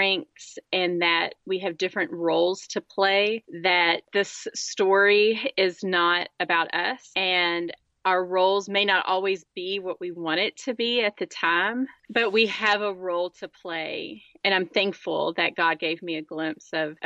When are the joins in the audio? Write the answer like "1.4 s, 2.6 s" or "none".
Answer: none